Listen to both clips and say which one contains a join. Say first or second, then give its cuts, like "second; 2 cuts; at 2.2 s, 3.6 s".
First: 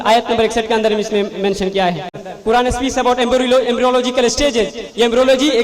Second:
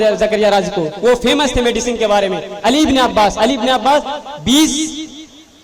first; 1 cut; at 2.3 s